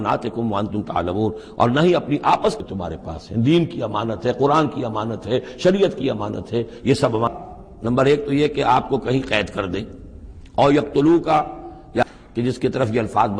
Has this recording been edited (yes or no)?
yes